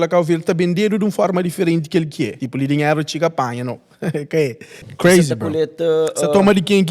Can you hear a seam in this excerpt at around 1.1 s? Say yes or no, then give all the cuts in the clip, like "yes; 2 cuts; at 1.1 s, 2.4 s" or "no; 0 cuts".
no; 2 cuts; at 2.4 s, 4.9 s